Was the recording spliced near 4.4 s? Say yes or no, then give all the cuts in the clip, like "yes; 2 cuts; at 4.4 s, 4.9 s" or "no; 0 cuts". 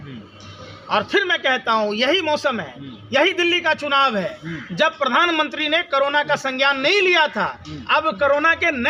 no; 0 cuts